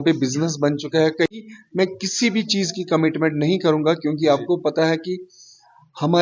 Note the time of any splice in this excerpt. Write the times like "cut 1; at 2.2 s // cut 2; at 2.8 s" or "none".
cut 1; at 1.3 s